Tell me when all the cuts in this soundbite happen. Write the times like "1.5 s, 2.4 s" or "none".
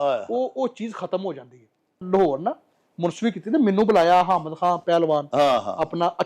2.0 s